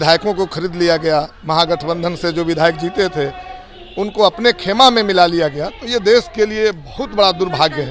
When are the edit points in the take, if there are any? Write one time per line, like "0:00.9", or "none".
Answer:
none